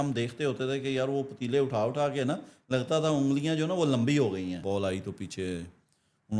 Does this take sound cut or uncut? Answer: cut